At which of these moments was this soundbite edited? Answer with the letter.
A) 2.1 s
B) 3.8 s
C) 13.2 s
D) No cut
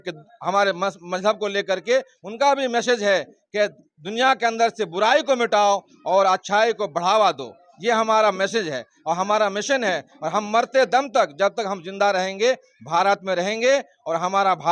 D